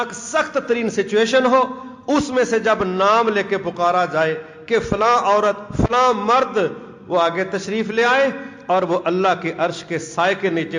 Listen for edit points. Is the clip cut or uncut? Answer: uncut